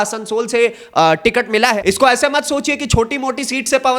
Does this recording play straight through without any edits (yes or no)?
no